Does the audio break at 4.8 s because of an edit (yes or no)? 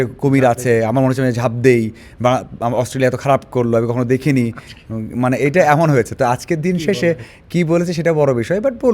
no